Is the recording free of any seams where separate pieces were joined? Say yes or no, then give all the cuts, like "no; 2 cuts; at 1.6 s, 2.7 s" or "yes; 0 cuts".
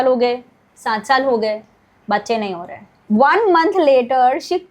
no; 1 cut; at 2.9 s